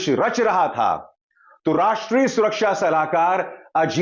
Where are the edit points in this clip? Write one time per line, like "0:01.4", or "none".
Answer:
none